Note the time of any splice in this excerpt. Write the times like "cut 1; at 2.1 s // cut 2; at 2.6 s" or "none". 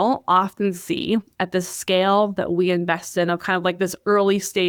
none